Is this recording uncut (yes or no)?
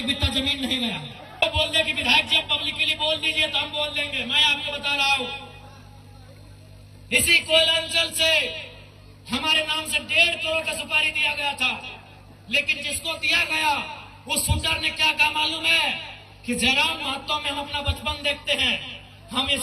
no